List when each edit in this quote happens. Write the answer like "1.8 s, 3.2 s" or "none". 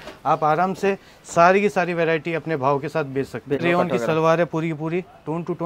3.6 s